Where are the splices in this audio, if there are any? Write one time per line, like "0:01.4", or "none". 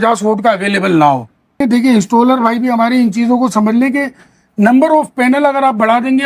0:01.6

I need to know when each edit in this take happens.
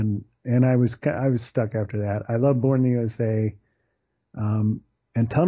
none

